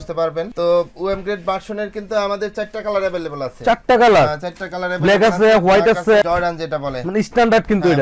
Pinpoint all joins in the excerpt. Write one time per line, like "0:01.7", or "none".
0:06.2